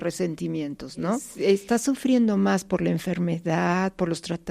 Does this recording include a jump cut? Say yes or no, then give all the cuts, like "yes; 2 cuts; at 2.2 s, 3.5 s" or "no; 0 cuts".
yes; 1 cut; at 1.3 s